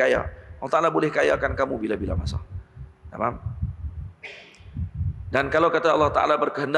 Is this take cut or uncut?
uncut